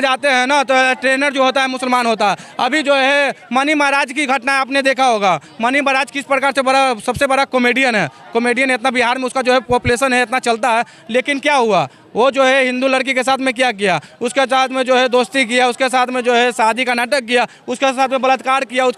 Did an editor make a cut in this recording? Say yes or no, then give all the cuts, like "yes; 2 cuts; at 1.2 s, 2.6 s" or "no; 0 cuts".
no; 0 cuts